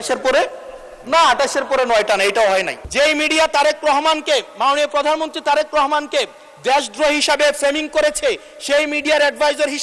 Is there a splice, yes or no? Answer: yes